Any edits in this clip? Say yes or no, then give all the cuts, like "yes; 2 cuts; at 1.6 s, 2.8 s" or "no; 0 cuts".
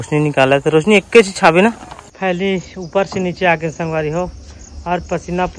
yes; 1 cut; at 2.2 s